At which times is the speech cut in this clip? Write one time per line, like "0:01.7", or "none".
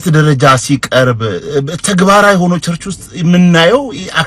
none